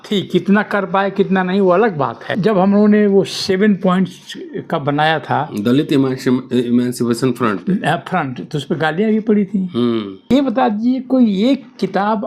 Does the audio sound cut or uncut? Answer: cut